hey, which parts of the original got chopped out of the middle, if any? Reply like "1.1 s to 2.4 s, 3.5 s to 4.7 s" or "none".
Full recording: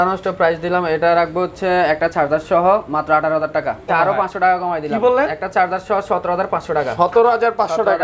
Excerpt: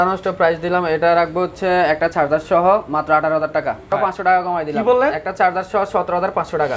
3.9 s to 4.1 s